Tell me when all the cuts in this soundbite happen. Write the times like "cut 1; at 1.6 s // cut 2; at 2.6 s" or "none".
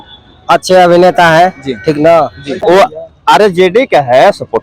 cut 1; at 2.6 s

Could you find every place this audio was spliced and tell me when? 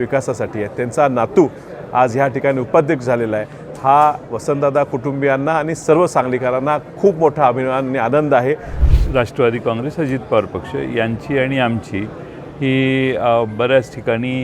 cut 1; at 8.8 s

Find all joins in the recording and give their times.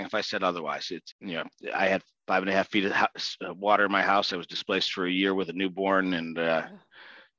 cut 1; at 1.0 s

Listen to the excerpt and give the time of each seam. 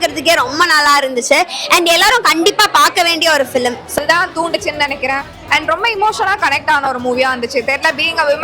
cut 1; at 4.0 s

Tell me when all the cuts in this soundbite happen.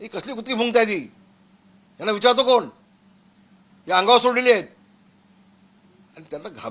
none

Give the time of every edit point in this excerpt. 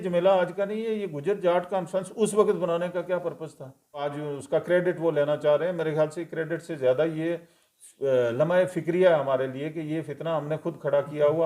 cut 1; at 4.2 s

